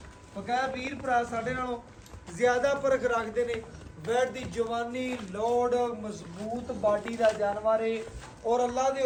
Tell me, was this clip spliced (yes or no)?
no